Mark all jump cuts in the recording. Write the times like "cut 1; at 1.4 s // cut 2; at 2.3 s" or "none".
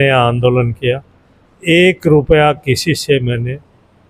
none